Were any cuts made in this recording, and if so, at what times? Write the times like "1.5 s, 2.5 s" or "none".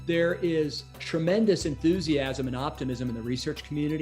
0.9 s